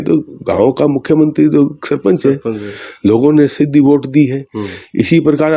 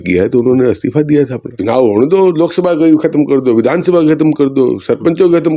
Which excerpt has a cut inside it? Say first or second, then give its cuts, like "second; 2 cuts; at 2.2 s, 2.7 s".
second; 1 cut; at 1.5 s